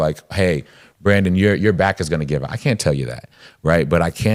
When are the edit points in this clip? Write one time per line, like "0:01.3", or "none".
none